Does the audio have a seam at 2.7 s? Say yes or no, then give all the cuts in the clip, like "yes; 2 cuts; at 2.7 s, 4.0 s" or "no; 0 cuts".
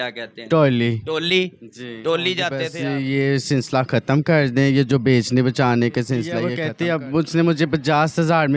yes; 2 cuts; at 2.7 s, 6.5 s